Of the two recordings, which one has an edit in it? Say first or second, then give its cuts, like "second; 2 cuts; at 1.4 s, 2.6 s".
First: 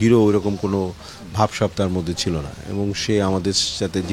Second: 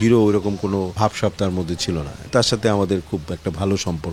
second; 2 cuts; at 0.9 s, 2.3 s